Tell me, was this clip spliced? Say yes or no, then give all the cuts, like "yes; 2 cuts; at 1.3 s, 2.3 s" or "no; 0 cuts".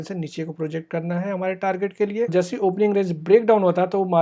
yes; 1 cut; at 2.3 s